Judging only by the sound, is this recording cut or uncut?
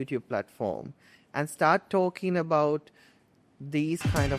uncut